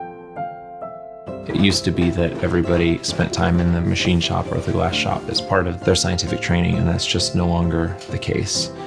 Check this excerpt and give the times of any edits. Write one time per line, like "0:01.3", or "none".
0:07.7